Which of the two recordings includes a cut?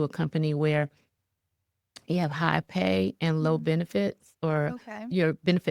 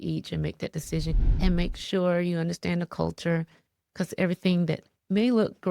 second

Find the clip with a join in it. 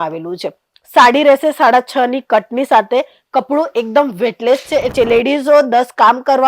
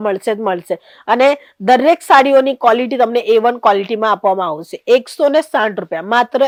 first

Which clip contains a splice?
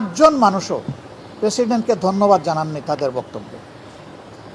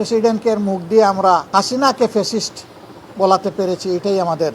second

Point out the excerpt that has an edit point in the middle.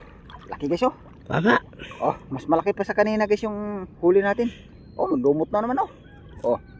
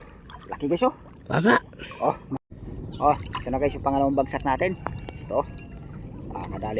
second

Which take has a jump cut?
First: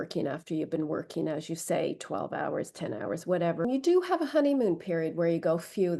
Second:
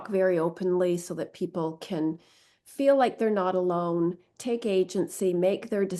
first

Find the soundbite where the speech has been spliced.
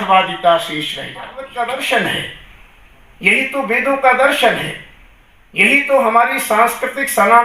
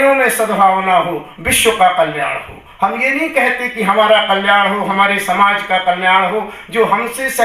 first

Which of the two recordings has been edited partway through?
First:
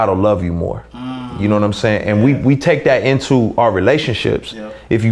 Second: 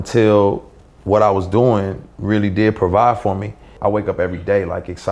second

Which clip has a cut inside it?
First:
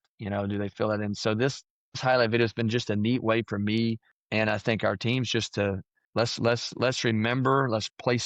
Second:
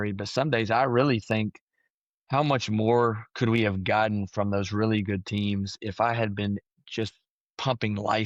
first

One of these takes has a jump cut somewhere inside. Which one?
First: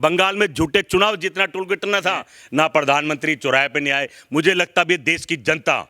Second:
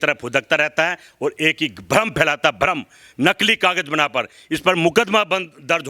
first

